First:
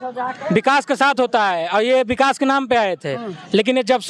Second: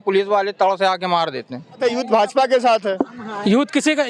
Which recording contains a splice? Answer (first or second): second